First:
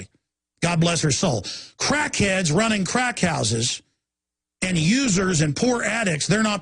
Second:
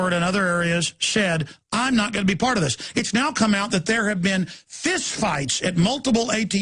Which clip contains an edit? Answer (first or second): first